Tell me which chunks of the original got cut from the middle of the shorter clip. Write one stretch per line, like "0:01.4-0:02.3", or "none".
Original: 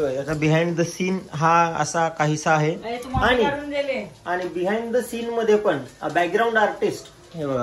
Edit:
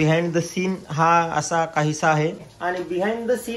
0:02.9-0:04.1